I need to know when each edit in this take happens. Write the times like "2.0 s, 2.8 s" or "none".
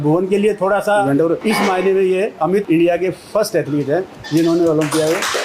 1.0 s